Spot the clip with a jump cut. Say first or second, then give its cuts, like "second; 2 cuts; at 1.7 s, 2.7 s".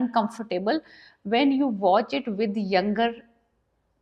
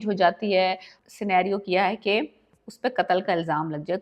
second; 1 cut; at 0.9 s